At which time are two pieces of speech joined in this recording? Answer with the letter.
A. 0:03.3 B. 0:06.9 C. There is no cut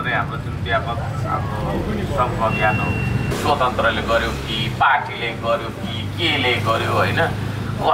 A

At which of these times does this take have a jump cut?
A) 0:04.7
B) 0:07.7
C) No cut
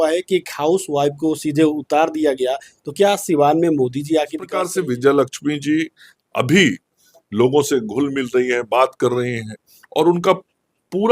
A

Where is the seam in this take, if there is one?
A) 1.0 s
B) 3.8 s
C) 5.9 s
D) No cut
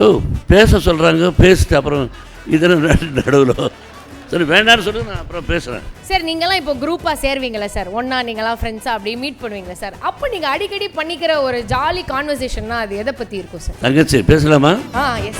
C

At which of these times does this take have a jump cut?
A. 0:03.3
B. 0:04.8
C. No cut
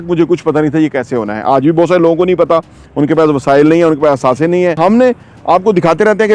B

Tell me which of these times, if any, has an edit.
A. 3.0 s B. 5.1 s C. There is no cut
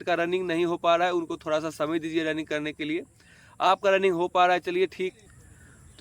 B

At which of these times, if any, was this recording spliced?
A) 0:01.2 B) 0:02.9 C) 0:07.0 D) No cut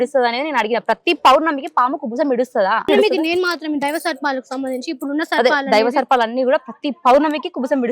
B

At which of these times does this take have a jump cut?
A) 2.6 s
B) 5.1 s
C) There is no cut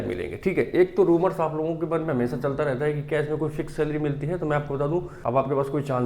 B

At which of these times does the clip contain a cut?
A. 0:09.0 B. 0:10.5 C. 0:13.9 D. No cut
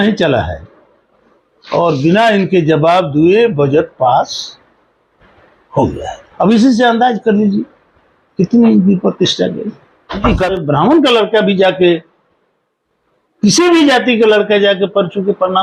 B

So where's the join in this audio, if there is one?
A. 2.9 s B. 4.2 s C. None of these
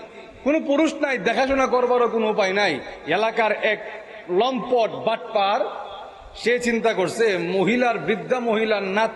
A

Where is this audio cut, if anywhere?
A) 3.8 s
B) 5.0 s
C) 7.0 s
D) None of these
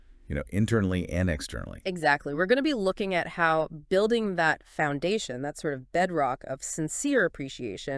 D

